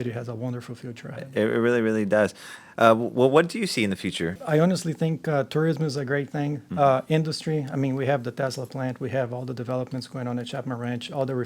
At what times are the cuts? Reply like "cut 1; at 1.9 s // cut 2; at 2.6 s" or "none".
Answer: cut 1; at 4.4 s